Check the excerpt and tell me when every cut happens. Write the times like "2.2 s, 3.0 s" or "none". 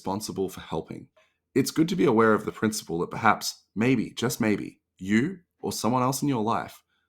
1.1 s